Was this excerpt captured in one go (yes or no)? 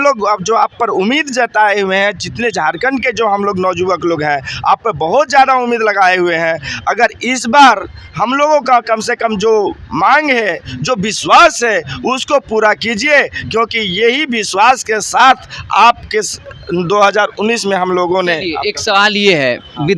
yes